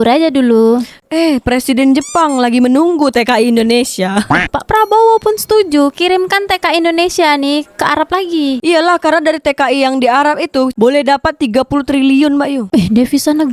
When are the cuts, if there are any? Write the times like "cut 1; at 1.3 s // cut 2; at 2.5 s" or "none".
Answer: cut 1; at 4.3 s